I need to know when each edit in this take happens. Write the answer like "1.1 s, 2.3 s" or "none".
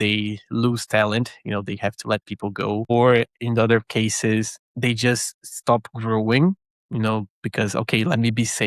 none